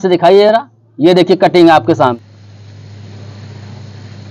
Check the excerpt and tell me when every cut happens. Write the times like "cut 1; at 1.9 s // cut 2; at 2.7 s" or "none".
cut 1; at 2.1 s